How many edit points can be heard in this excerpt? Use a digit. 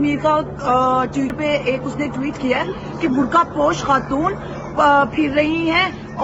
1